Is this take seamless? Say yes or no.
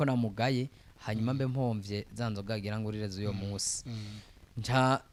yes